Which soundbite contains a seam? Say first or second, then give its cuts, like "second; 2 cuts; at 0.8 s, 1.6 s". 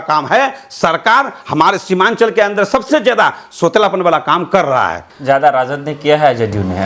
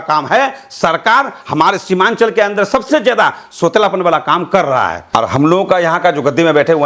second; 1 cut; at 5.0 s